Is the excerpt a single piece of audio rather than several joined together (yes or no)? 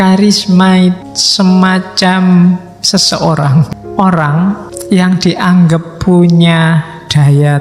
no